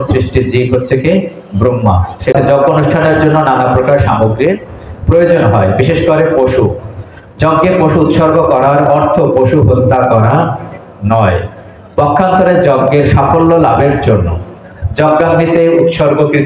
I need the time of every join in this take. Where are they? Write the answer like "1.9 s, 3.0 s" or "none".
2.3 s